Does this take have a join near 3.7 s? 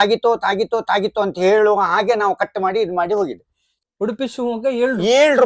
yes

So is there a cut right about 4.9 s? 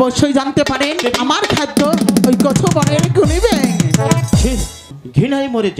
yes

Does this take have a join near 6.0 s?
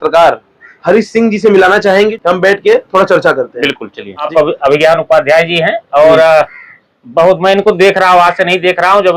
no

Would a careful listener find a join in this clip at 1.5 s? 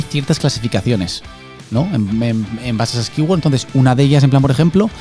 no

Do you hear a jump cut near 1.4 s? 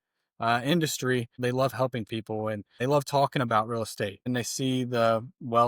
yes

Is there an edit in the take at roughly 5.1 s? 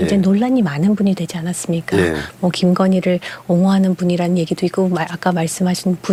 no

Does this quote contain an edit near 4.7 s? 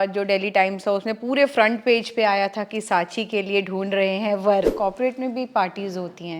yes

